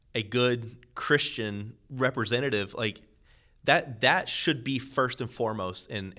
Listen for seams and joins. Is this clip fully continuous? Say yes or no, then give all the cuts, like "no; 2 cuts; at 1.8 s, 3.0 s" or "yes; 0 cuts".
yes; 0 cuts